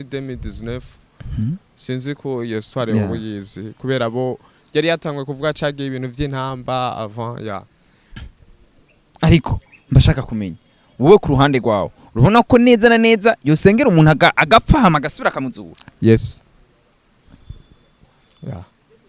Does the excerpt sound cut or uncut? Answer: cut